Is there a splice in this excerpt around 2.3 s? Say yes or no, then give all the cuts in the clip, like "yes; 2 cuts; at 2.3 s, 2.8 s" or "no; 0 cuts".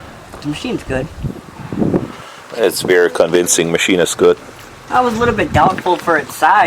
yes; 1 cut; at 2.3 s